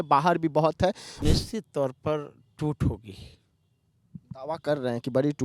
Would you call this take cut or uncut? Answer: cut